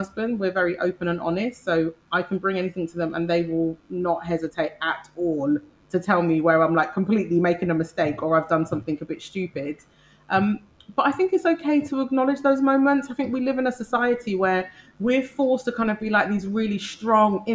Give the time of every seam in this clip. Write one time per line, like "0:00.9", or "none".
none